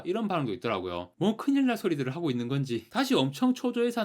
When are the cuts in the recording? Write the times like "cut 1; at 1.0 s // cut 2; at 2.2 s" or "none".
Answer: cut 1; at 1.1 s